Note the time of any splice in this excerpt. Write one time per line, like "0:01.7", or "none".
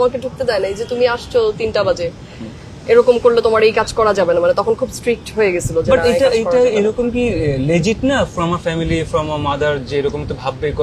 none

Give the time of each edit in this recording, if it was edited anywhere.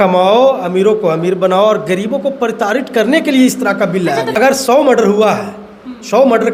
0:04.3

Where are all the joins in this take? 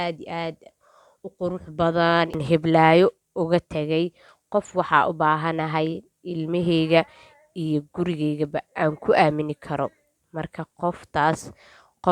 0:02.4

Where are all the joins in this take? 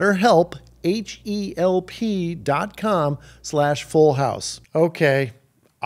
0:04.5

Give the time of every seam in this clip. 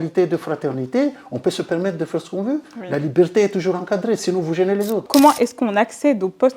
0:05.1

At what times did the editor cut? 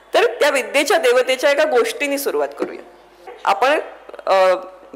0:03.3

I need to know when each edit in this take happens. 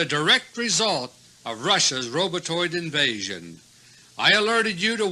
none

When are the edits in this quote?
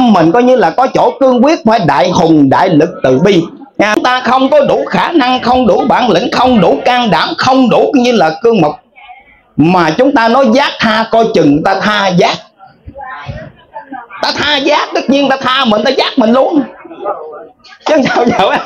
0:03.9

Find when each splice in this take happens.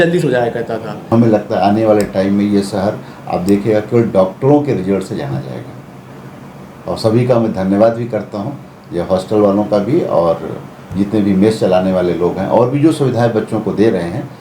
0:01.0

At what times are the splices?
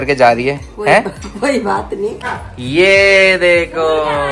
0:02.1

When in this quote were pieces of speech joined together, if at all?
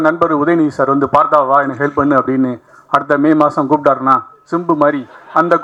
none

